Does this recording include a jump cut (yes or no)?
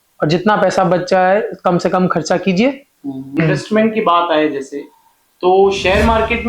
yes